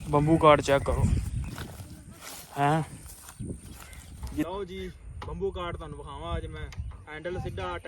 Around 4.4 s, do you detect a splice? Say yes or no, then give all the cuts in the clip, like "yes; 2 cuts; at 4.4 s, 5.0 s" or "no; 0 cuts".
yes; 1 cut; at 4.4 s